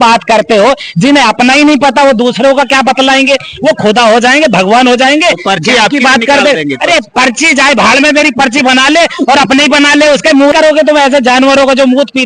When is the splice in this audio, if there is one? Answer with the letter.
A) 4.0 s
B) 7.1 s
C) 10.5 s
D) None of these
C